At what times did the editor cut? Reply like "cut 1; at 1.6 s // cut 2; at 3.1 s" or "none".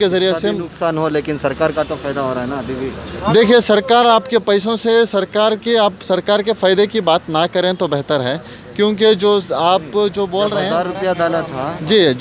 none